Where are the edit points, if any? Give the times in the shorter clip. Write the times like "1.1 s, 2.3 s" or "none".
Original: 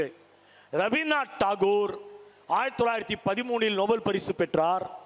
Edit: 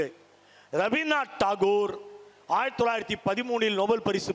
none